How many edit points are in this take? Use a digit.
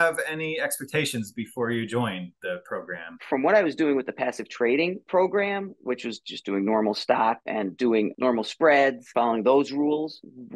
1